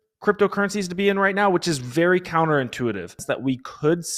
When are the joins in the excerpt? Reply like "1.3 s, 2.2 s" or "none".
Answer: 3.2 s